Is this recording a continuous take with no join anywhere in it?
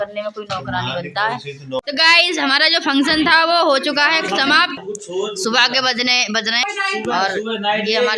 no; 3 cuts; at 1.8 s, 4.8 s, 6.6 s

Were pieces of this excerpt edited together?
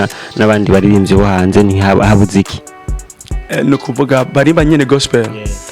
no; 0 cuts

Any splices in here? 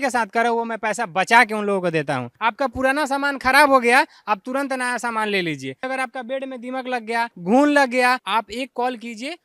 yes; 4 cuts; at 2.3 s, 5.9 s, 7.4 s, 8.2 s

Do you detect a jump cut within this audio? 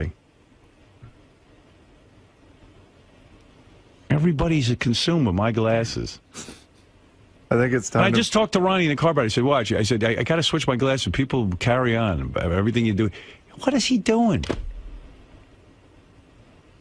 no; 0 cuts

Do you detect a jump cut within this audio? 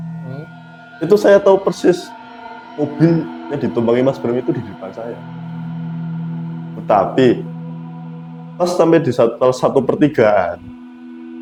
no; 0 cuts

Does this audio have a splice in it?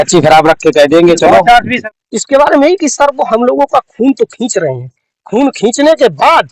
yes; 1 cut; at 1.7 s

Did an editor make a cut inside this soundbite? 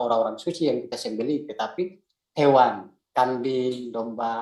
no; 0 cuts

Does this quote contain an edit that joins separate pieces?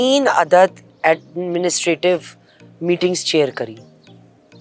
no; 0 cuts

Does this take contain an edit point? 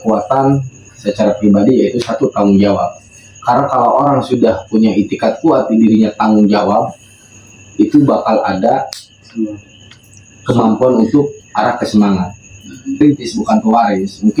yes; 1 cut; at 12.9 s

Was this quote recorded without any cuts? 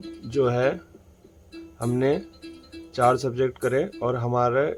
yes; 0 cuts

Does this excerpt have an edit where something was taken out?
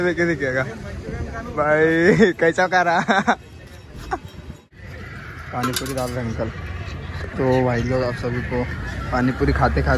yes; 1 cut; at 4.6 s

